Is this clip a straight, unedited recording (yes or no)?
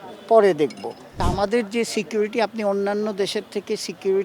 no